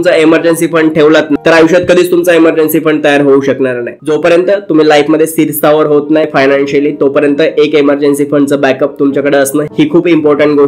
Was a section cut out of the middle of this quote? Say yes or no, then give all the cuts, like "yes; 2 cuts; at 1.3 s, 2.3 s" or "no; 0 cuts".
yes; 3 cuts; at 1.4 s, 3.9 s, 6.3 s